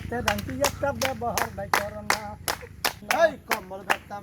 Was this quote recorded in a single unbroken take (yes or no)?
no